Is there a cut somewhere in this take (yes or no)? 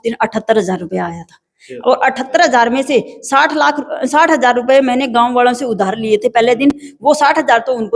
no